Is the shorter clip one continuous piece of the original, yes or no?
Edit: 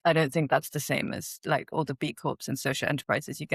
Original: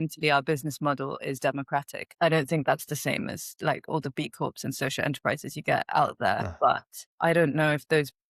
yes